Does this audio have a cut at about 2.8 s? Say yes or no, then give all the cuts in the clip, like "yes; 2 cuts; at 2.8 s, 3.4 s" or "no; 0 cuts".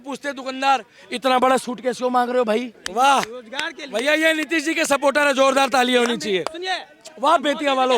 yes; 1 cut; at 2.8 s